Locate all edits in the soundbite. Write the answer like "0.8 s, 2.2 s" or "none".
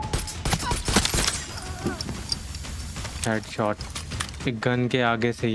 4.3 s